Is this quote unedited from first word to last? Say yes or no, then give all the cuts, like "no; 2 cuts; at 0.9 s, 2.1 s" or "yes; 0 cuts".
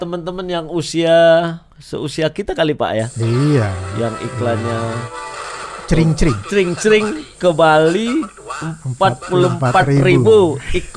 yes; 0 cuts